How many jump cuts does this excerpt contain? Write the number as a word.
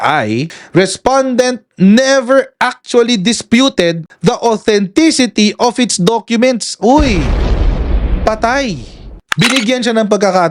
one